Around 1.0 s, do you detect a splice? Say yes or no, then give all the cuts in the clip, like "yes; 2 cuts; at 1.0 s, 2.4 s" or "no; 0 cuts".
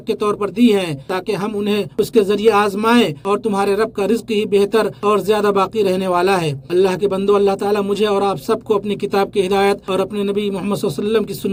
no; 0 cuts